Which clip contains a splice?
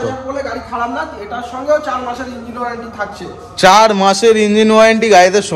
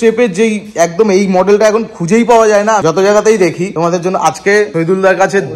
second; 3 cuts; at 2.8 s, 3.7 s, 4.7 s

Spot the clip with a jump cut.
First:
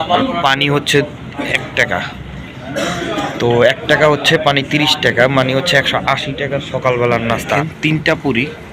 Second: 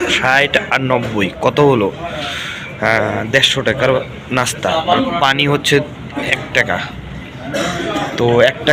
first; 1 cut; at 7.6 s

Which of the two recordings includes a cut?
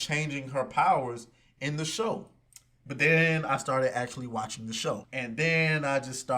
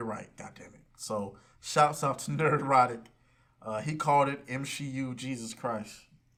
first; 1 cut; at 5.1 s

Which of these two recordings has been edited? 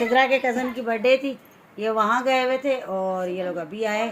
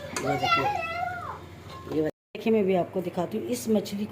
second; 1 cut; at 2.1 s

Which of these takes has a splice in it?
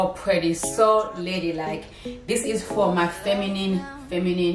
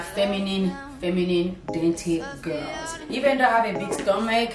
second; 1 cut; at 2.9 s

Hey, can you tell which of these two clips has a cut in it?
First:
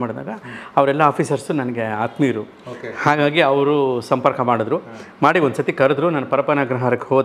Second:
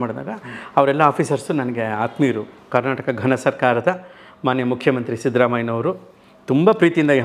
second; 1 cut; at 2.5 s

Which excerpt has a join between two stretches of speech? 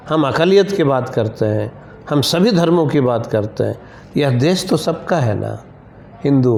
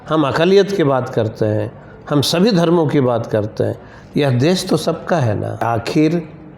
second; 1 cut; at 5.7 s

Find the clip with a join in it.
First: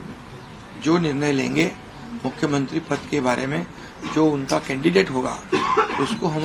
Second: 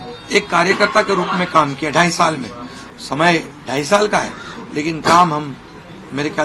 second; 1 cut; at 2.8 s

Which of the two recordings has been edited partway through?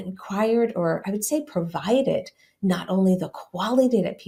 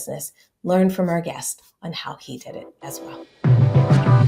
second; 1 cut; at 2.8 s

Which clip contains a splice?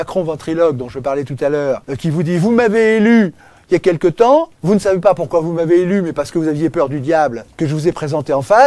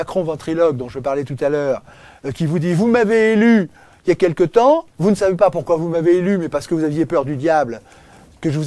first; 2 cuts; at 1.9 s, 7.4 s

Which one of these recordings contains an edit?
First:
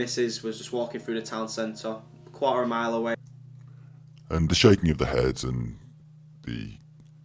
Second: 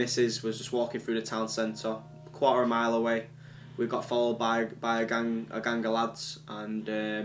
second; 2 cuts; at 3.0 s, 4.8 s

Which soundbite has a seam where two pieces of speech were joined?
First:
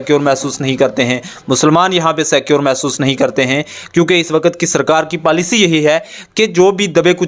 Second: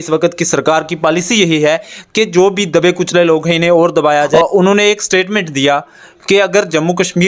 second; 1 cut; at 4.3 s

